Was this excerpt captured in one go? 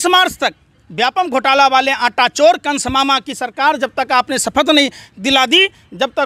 yes; 0 cuts

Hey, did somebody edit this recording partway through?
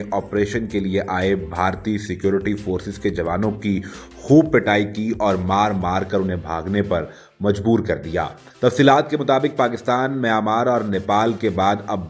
no; 0 cuts

